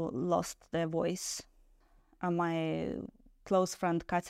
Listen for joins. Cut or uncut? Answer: cut